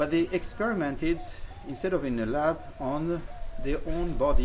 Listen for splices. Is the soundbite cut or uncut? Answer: cut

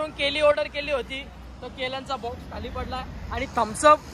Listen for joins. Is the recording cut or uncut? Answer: uncut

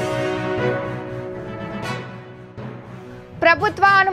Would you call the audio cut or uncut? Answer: cut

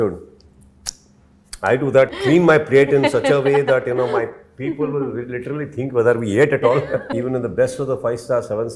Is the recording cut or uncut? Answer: cut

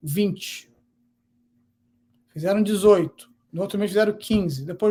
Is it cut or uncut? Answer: uncut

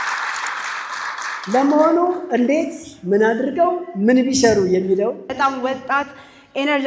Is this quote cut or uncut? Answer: cut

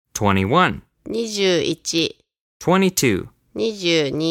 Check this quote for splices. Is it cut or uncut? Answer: cut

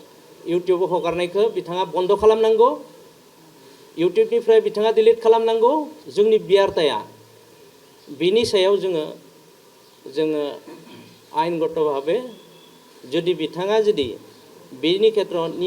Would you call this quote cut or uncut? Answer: cut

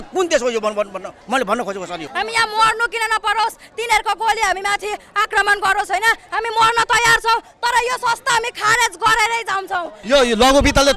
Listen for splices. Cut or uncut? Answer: cut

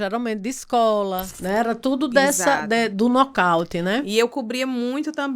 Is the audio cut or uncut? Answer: cut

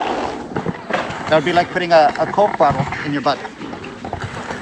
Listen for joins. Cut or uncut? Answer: uncut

